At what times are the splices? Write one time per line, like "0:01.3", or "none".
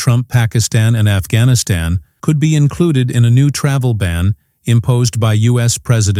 none